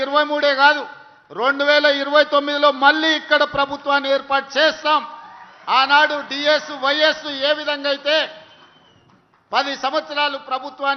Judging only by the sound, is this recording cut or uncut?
uncut